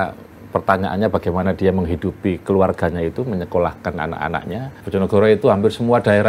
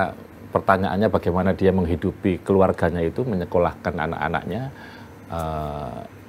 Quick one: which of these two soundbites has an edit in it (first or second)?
first